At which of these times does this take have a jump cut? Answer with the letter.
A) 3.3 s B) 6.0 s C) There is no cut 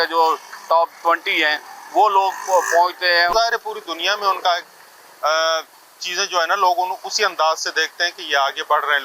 A